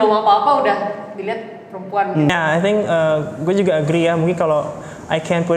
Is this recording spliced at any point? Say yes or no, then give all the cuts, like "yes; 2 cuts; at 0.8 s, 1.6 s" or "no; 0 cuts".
yes; 1 cut; at 2.3 s